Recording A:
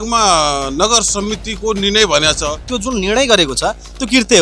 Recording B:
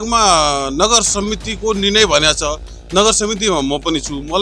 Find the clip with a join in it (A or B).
A